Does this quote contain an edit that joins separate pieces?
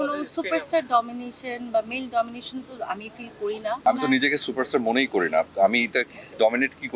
yes; 1 cut; at 3.9 s

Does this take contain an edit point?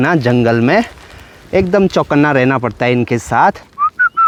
no; 0 cuts

